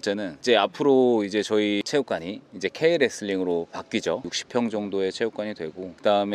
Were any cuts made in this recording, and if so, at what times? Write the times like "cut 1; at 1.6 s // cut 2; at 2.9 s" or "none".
cut 1; at 4.2 s